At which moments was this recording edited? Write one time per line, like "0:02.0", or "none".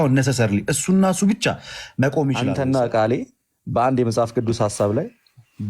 0:02.4